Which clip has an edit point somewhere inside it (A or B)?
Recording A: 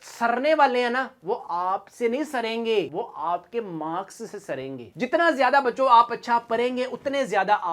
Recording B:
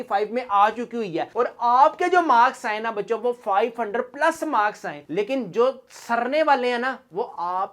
B